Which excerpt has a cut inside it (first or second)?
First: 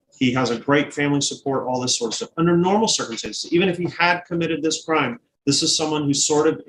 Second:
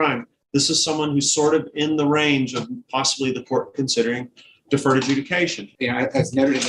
second